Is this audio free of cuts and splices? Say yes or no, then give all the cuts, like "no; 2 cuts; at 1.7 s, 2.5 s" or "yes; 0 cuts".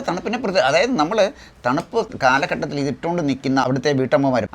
no; 2 cuts; at 2.1 s, 3.6 s